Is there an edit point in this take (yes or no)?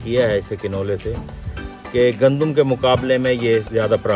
no